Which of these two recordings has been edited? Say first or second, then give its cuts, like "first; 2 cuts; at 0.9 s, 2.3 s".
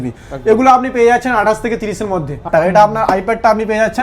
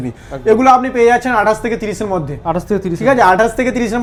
first; 1 cut; at 2.5 s